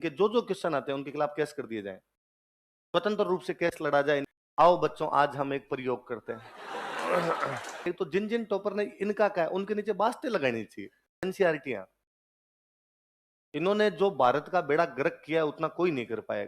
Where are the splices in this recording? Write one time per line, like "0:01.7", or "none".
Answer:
0:04.3
0:07.9
0:11.2